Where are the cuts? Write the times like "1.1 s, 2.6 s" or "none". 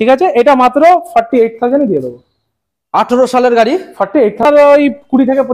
4.4 s